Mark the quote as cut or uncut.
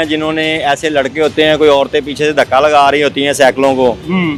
uncut